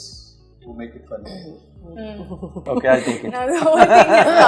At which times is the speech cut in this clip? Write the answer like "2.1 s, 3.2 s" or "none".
2.7 s